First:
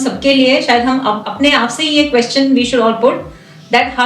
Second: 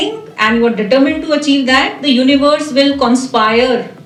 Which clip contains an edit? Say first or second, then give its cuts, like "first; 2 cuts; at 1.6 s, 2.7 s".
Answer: first; 1 cut; at 1.3 s